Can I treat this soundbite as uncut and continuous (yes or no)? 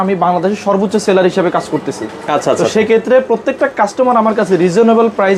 yes